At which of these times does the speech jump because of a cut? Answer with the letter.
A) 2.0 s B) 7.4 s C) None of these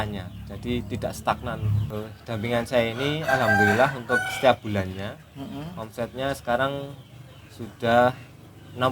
A